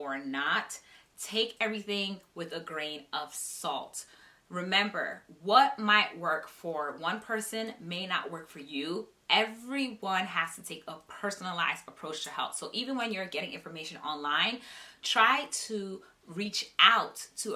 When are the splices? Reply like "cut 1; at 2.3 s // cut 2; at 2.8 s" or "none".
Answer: none